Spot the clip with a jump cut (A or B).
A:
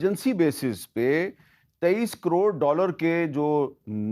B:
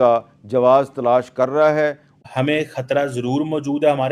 B